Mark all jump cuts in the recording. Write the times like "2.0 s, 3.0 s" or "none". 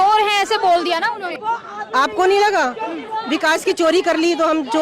1.3 s